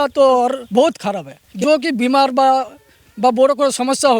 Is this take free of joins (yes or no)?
no